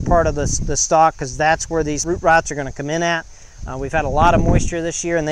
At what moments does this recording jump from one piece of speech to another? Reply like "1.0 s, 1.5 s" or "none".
2.0 s